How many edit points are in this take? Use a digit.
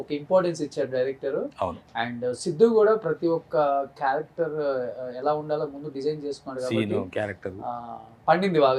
0